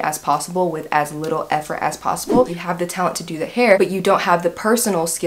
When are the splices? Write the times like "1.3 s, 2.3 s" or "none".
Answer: 2.4 s